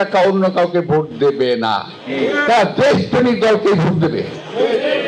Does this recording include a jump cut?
no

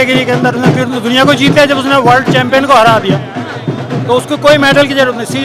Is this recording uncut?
yes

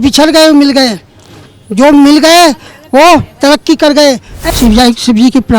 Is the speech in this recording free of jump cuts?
no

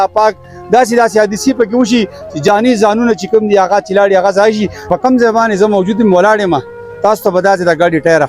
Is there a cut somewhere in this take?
yes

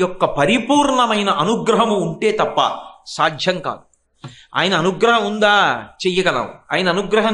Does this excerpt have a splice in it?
no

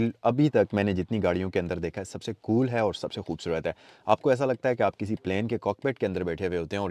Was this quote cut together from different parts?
no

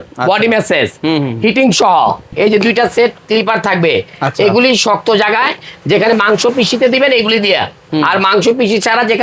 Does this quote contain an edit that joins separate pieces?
yes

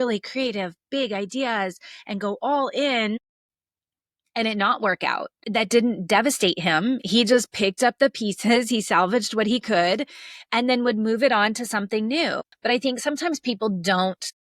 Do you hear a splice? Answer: yes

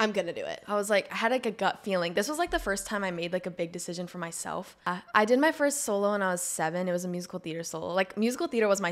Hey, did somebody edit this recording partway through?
yes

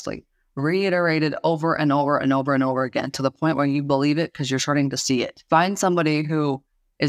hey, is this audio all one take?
no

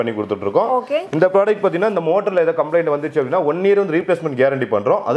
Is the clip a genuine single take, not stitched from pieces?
yes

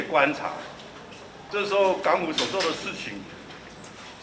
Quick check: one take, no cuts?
no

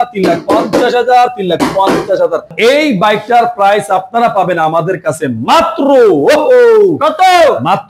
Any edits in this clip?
yes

